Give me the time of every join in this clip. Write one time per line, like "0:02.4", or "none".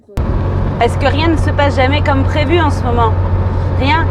none